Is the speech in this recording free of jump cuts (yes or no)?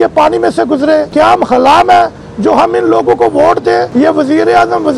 no